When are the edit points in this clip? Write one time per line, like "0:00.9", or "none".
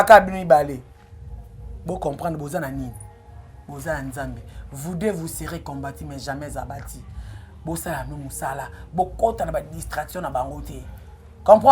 none